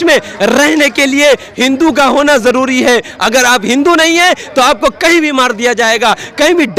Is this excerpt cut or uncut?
uncut